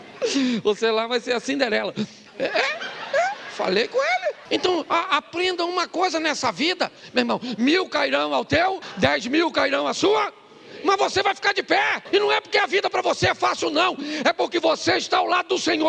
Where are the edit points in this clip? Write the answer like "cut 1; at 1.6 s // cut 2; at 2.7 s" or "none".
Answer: cut 1; at 4.4 s // cut 2; at 8.9 s // cut 3; at 12.0 s